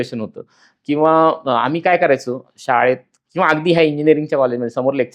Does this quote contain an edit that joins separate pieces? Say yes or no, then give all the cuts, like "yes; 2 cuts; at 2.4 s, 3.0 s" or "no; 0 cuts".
no; 0 cuts